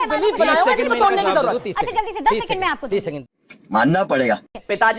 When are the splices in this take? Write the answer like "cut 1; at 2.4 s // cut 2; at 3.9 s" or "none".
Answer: cut 1; at 3.2 s